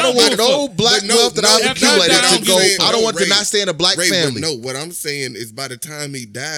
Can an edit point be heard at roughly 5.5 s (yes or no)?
no